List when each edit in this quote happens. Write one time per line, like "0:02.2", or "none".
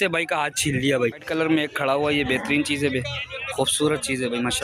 0:01.2